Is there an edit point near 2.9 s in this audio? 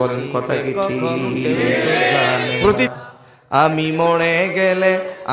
yes; 1 cut; at 2.9 s

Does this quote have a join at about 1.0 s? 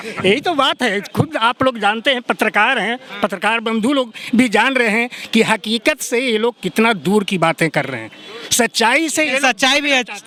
no; 0 cuts

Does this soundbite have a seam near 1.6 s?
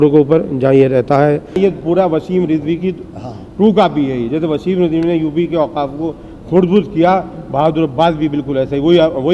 yes; 1 cut; at 1.6 s

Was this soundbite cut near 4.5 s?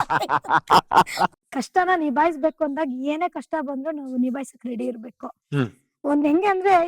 no; 1 cut; at 1.4 s

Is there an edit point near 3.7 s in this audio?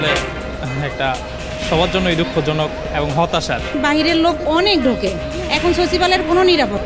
yes; 1 cut; at 3.7 s

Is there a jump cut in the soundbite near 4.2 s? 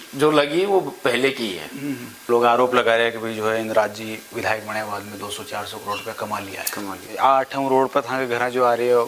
no; 2 cuts; at 2.1 s, 7.0 s

